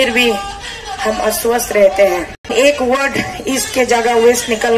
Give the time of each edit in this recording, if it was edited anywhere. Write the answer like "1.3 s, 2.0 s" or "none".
2.5 s